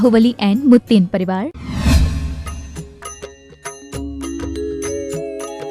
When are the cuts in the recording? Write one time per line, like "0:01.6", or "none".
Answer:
0:01.6